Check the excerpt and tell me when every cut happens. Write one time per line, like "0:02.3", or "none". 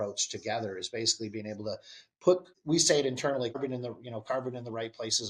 0:02.5
0:03.6

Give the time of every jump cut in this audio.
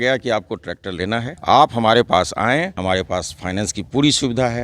0:01.3
0:02.7

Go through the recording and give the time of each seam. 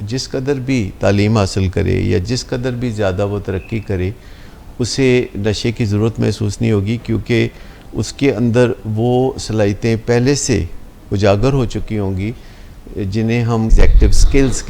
0:13.7

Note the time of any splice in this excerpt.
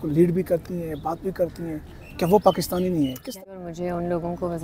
0:03.2

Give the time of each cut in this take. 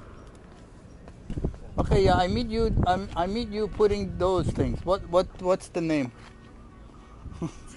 0:01.3

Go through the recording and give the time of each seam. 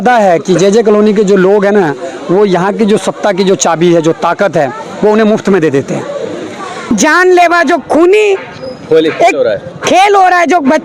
0:06.9

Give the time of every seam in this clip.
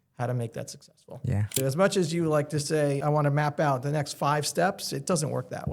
0:01.6
0:03.0

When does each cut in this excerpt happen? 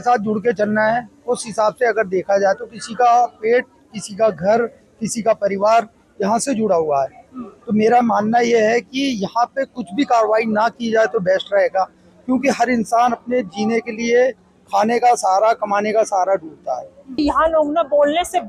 0:17.2

